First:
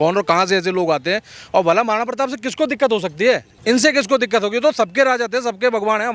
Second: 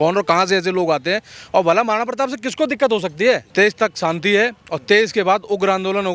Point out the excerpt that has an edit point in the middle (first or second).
second